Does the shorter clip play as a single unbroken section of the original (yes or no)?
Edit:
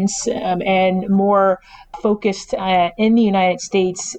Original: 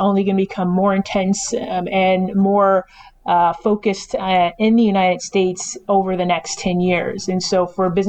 no